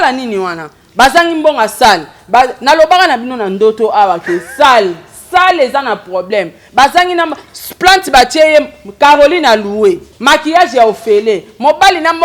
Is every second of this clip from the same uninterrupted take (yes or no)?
no